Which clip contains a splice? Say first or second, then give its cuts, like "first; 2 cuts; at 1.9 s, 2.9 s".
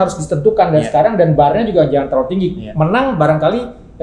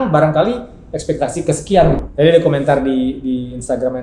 second; 1 cut; at 2.0 s